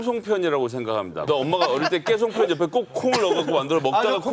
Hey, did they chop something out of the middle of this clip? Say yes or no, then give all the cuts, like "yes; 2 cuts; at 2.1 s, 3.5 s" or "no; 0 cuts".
yes; 1 cut; at 1.3 s